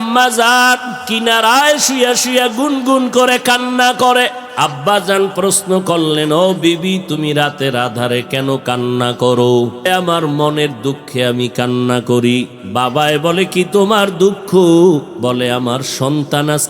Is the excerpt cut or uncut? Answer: cut